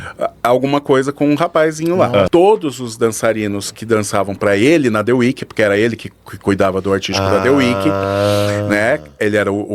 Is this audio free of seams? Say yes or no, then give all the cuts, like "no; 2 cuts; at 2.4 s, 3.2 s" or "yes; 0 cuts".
no; 1 cut; at 2.3 s